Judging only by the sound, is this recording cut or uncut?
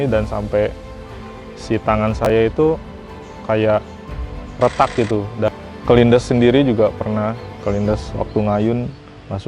cut